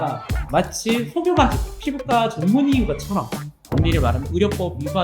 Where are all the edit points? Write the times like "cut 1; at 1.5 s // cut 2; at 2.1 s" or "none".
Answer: cut 1; at 1.7 s